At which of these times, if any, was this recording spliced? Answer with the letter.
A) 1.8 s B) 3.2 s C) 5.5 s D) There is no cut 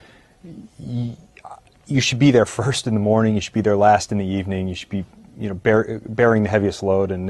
C